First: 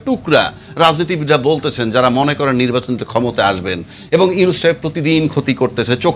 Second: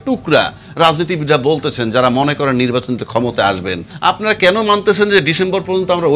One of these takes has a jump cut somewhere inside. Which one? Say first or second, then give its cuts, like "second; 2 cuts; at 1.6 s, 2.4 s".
second; 1 cut; at 3.9 s